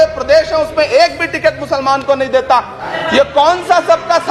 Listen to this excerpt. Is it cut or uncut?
cut